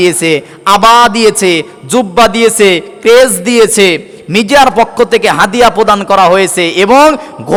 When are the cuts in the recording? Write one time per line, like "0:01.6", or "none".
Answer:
none